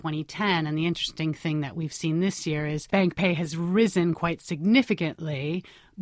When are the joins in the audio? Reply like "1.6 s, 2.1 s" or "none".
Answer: 2.8 s